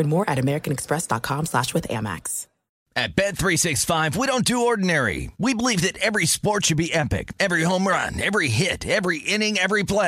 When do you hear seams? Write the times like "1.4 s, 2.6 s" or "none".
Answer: 2.7 s